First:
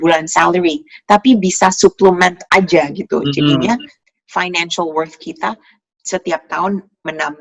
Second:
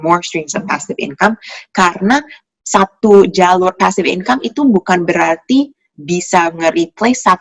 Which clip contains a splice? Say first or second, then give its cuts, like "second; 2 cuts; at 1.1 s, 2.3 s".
first; 1 cut; at 4.0 s